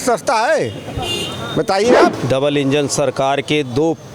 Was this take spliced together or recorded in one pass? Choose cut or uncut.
cut